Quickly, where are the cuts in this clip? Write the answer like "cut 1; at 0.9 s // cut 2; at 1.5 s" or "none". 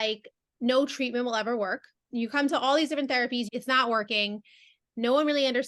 cut 1; at 2.0 s // cut 2; at 3.5 s